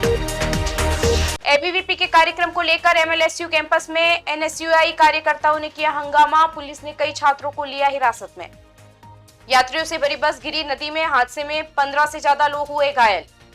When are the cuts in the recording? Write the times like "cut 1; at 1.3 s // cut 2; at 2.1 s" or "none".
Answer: cut 1; at 1.1 s